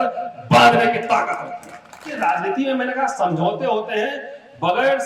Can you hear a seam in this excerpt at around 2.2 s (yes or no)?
yes